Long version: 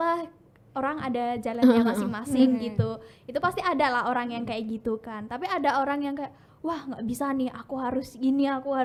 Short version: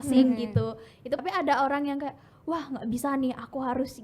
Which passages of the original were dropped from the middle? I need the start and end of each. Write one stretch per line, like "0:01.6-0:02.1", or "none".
0:03.4-0:05.3

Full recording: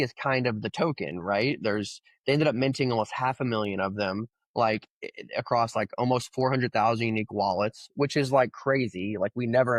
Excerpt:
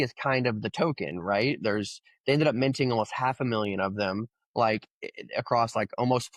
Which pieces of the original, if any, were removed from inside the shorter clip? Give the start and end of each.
none

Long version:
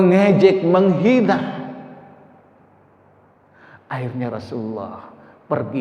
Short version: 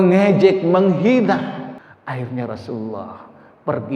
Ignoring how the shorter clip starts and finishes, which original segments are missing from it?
0:01.9-0:03.7

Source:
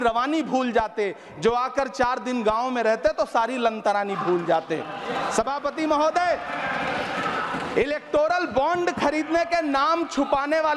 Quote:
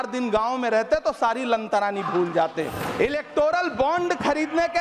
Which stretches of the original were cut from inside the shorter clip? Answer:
0:04.9-0:07.6

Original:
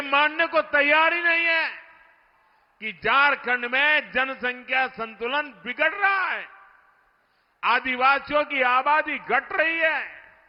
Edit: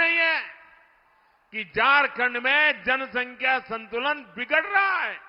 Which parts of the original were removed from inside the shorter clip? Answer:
none

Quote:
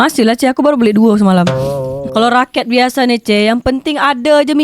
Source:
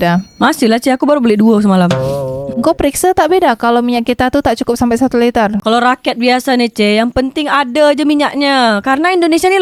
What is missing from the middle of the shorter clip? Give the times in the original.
0:02.5-0:05.6

